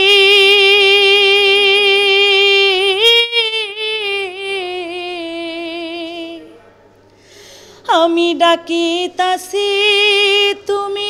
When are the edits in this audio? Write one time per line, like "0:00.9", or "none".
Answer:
none